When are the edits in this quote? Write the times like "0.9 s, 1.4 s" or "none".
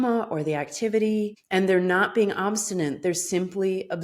1.4 s